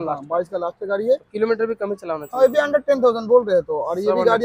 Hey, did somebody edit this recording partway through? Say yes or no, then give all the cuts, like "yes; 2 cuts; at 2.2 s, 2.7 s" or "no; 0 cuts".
no; 0 cuts